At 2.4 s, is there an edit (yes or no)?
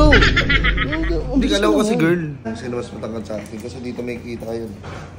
yes